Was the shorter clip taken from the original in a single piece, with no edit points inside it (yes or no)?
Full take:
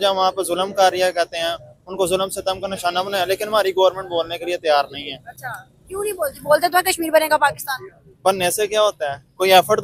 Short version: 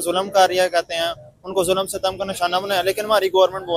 yes